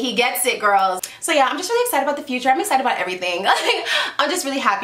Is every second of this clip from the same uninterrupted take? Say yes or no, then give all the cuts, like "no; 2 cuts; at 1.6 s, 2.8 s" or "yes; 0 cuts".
no; 1 cut; at 1.0 s